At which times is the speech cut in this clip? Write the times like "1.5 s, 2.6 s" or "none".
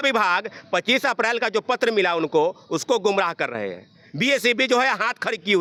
none